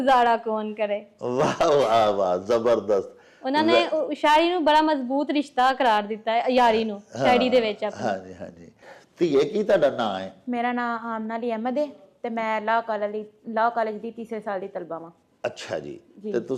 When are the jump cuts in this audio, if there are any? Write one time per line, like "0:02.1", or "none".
none